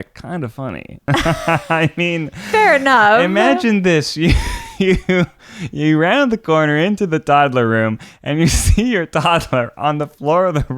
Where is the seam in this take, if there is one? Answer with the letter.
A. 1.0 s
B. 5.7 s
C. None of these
A